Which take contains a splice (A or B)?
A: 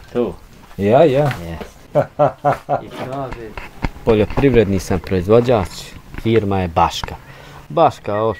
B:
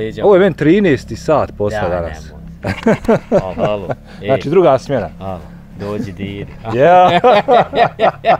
A